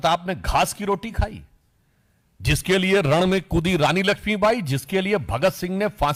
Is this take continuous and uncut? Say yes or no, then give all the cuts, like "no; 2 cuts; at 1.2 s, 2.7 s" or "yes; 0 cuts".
yes; 0 cuts